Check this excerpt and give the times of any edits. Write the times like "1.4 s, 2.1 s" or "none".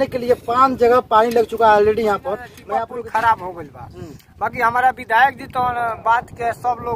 2.5 s